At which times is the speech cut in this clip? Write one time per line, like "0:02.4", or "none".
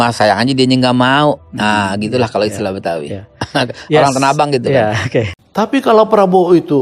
0:05.4